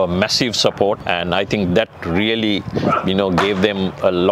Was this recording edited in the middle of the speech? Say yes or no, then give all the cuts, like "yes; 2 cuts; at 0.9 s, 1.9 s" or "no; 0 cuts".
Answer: yes; 1 cut; at 1.0 s